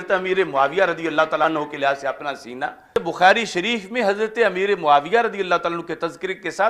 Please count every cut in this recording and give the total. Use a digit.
2